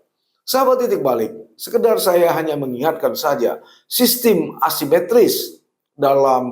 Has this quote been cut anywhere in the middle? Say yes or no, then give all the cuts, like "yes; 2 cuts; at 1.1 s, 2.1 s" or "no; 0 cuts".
no; 0 cuts